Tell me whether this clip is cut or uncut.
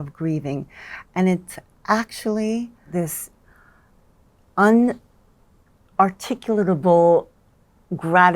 cut